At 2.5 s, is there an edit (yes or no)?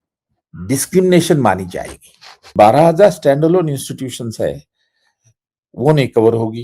yes